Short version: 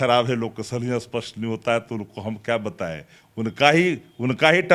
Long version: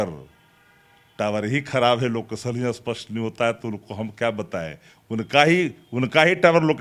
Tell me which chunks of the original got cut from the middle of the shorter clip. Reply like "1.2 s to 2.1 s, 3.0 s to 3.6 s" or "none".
none

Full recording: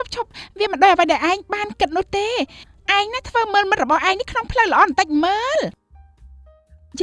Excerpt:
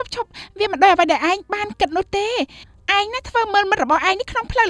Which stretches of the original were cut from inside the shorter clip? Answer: none

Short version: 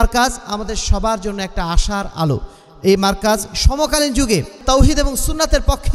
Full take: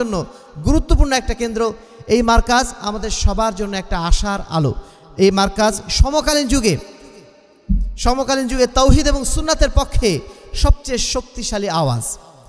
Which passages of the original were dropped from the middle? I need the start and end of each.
7.0 s to 8.7 s

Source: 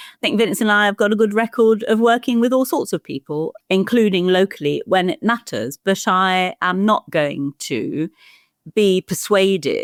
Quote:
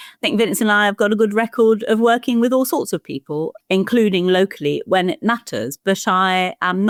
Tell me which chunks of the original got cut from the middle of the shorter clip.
none

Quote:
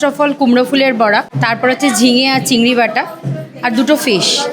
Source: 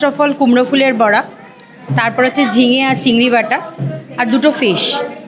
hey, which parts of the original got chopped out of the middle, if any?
1.3 s to 1.9 s

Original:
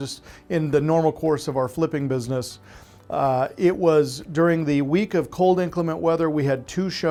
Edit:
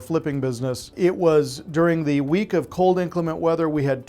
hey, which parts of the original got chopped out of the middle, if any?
2.6 s to 3.5 s

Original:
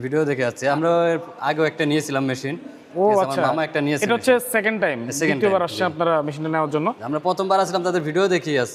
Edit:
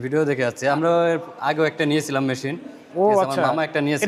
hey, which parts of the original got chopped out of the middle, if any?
none

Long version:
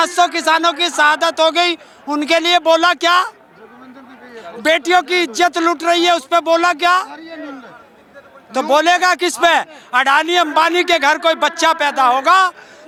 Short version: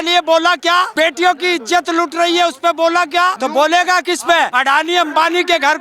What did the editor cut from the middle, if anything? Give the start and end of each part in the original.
3.3 s to 4.6 s, 7.0 s to 8.5 s, 9.7 s to 9.9 s

